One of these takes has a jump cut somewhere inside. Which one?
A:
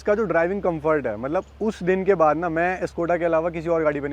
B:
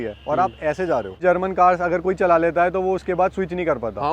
B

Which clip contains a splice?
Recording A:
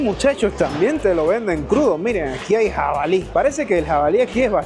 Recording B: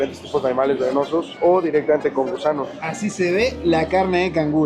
B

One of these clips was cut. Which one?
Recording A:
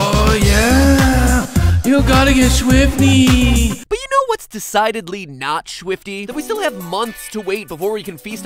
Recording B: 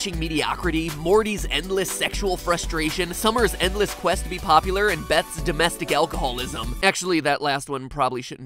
A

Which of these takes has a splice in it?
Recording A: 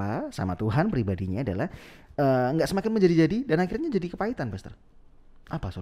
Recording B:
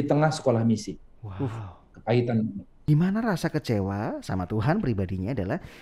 B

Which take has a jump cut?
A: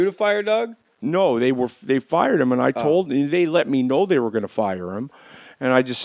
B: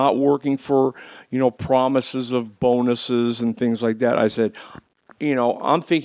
B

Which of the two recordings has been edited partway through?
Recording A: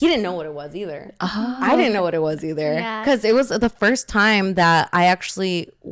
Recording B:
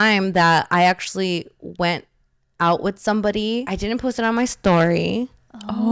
B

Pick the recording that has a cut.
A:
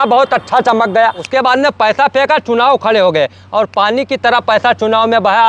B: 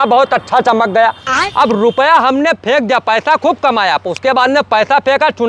A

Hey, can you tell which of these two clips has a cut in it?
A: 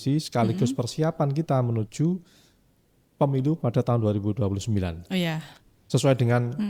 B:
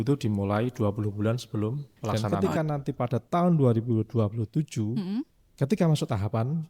B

